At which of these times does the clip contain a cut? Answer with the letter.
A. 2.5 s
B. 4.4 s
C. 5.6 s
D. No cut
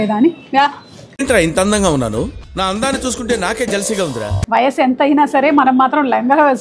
B